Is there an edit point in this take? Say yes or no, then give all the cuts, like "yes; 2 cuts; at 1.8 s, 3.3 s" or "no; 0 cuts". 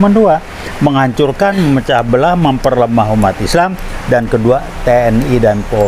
no; 0 cuts